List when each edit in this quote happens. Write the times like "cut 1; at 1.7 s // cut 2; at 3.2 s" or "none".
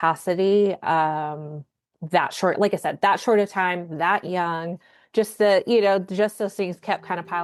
none